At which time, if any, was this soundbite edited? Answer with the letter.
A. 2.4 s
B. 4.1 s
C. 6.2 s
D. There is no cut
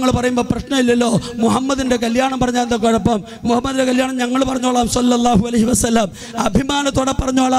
D